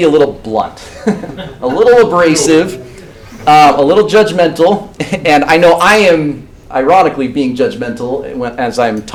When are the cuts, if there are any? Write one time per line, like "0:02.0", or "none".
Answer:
none